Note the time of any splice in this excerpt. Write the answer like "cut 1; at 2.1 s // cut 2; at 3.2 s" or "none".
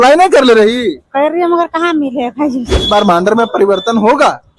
cut 1; at 2.7 s